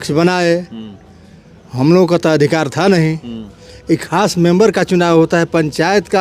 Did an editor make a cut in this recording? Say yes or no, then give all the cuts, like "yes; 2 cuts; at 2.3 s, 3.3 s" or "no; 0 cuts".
no; 0 cuts